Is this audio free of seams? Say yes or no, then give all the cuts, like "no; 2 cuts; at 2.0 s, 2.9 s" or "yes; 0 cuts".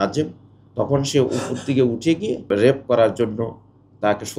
no; 1 cut; at 2.8 s